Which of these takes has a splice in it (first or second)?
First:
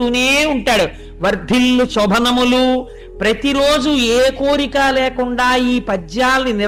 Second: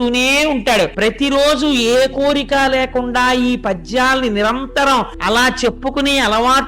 second